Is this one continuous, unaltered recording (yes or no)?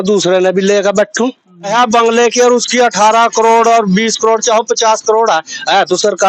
no